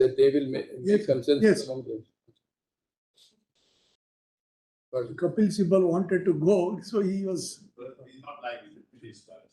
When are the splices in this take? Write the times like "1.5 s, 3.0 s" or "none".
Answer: none

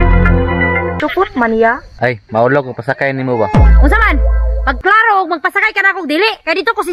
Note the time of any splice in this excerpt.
1.0 s

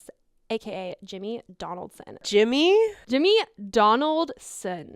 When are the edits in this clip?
2.2 s

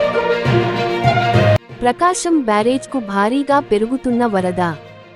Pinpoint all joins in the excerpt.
1.7 s

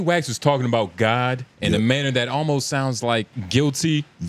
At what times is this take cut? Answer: 1.5 s, 3.4 s

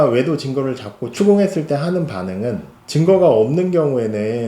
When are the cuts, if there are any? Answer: 2.7 s

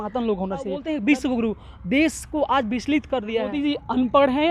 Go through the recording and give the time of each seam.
0.8 s, 3.5 s

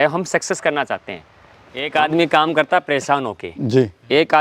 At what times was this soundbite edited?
1.9 s

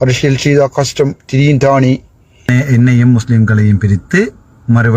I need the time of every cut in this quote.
2.5 s

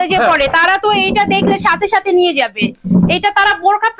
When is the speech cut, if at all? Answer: none

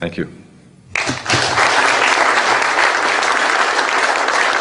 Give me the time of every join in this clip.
none

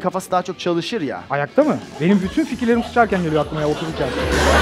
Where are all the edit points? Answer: none

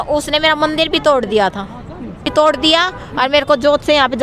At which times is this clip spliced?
2.3 s

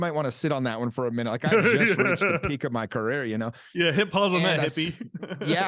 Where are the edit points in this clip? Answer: none

